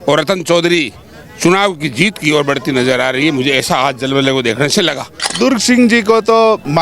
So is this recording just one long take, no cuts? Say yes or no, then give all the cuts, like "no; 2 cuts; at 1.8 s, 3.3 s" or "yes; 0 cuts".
no; 1 cut; at 5.2 s